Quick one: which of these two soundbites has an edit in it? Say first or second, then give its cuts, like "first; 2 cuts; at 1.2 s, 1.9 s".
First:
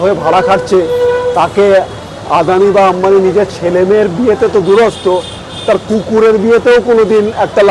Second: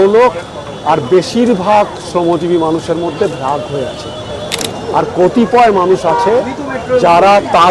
second; 1 cut; at 4.5 s